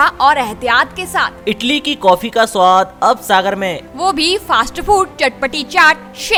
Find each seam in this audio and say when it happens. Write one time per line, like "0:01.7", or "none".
none